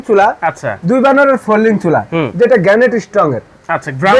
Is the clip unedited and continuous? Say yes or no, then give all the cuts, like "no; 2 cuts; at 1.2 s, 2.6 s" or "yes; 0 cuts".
yes; 0 cuts